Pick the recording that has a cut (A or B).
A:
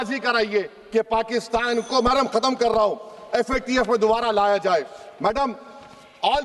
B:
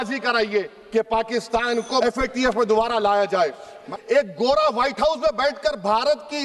B